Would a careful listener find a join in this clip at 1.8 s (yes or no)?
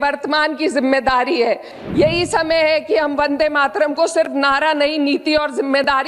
yes